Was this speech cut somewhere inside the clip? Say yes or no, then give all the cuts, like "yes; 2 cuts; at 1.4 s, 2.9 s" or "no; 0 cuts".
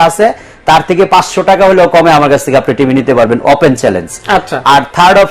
no; 0 cuts